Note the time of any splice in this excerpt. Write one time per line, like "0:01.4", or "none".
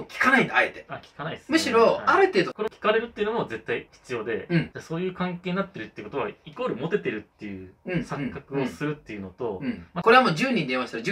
0:02.6
0:04.7
0:09.9